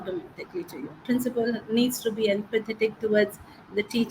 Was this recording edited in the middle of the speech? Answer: yes; 1 cut; at 1.0 s

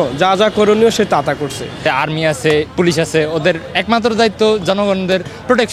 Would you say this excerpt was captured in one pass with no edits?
no; 1 cut; at 1.8 s

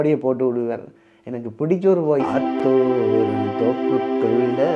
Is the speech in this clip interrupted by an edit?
yes; 1 cut; at 2.3 s

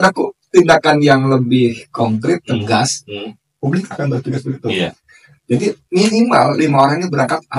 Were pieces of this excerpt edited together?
no; 0 cuts

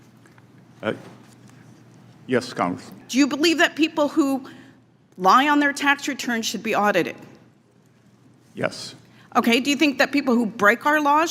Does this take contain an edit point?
yes; 1 cut; at 2.9 s

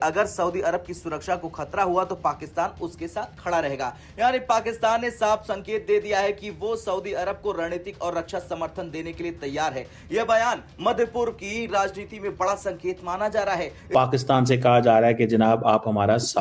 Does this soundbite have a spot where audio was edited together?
yes; 1 cut; at 13.9 s

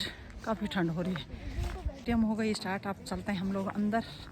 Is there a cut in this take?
yes; 1 cut; at 1.9 s

